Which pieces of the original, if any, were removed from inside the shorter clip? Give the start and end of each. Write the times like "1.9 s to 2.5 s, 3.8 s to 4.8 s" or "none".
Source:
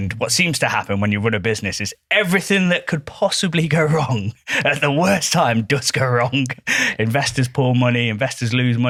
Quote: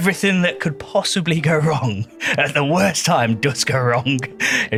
none